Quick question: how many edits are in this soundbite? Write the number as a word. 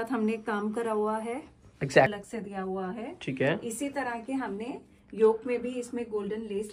one